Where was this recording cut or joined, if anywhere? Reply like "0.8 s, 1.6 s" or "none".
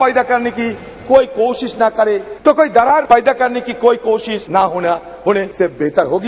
2.3 s, 3.0 s, 4.4 s, 5.5 s